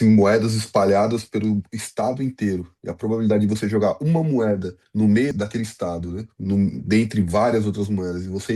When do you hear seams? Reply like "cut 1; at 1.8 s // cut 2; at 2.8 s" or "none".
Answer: cut 1; at 4.8 s // cut 2; at 5.3 s